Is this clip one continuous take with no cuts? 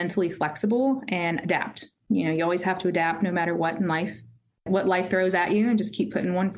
no; 1 cut; at 4.6 s

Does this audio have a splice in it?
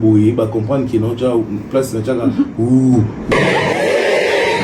yes; 1 cut; at 3.3 s

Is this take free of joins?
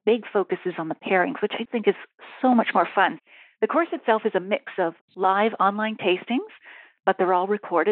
no; 2 cuts; at 1.7 s, 3.2 s

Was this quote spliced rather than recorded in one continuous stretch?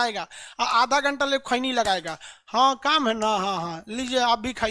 no; 0 cuts

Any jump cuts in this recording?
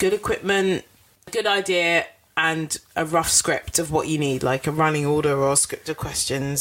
no; 0 cuts

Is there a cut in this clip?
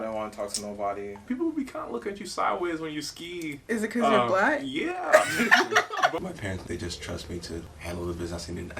yes; 3 cuts; at 1.2 s, 6.2 s, 7.7 s

